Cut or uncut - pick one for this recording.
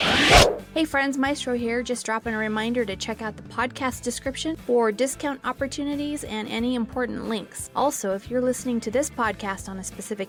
uncut